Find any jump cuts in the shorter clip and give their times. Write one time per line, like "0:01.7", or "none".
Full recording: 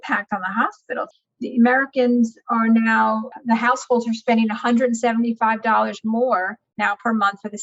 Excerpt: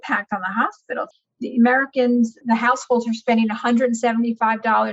0:02.4